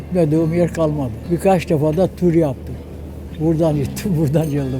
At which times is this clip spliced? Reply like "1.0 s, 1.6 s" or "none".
1.1 s